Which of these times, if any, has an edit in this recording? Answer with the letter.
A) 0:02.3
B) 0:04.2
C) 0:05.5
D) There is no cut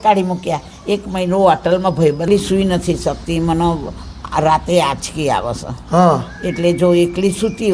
A